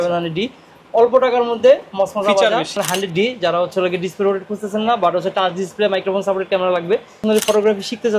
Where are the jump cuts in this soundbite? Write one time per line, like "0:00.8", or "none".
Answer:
0:02.8
0:07.2